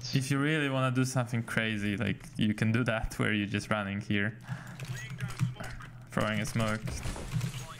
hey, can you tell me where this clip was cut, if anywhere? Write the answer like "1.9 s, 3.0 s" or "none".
none